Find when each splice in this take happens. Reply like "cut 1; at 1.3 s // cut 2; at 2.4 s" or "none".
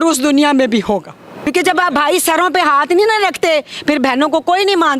cut 1; at 1.5 s

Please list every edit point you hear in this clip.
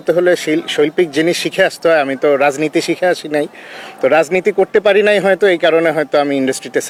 none

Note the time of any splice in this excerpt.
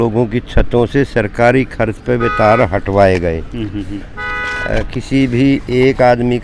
none

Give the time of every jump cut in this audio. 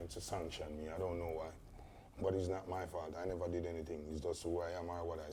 none

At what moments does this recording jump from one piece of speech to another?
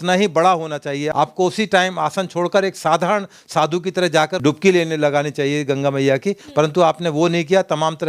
cut 1; at 1.1 s // cut 2; at 4.4 s

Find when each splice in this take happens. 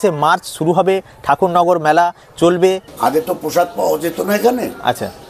cut 1; at 2.9 s

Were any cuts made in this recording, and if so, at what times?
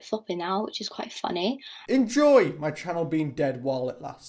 cut 1; at 1.8 s

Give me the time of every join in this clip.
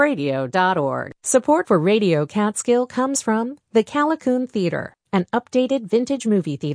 cut 1; at 1.1 s

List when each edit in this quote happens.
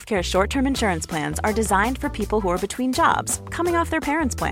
none

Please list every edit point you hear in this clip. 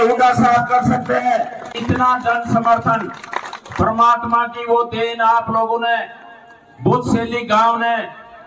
cut 1; at 1.7 s

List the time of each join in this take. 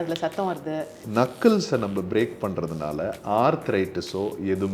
cut 1; at 1.0 s

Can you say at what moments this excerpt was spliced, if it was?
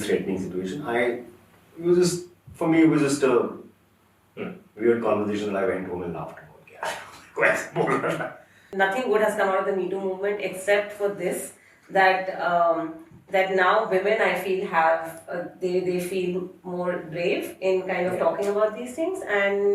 cut 1; at 8.7 s

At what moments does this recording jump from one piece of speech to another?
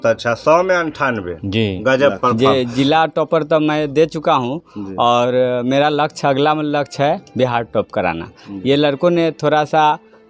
cut 1; at 2.3 s

